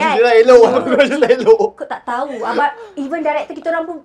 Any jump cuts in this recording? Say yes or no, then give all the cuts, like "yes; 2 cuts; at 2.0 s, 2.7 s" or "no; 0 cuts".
no; 0 cuts